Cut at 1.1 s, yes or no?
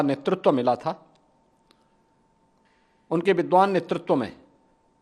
no